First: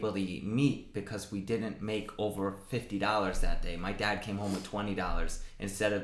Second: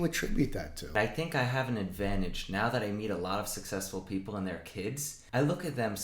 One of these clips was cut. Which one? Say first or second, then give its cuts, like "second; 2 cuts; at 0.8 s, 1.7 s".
second; 2 cuts; at 0.9 s, 5.1 s